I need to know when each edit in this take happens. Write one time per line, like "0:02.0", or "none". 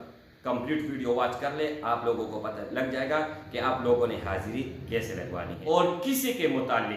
0:05.7